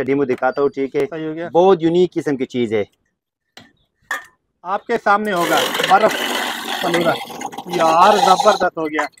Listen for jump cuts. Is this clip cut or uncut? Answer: uncut